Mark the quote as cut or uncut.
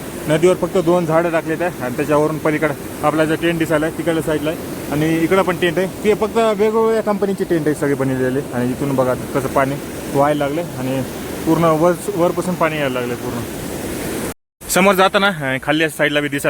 cut